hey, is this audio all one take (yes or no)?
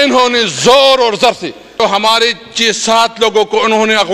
no